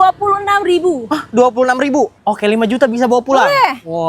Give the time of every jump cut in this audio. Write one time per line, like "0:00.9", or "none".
0:02.2